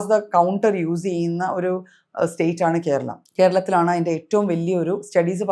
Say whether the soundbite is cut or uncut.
cut